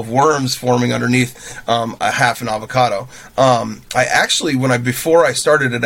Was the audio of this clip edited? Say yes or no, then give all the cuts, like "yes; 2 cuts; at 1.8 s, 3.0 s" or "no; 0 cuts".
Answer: no; 0 cuts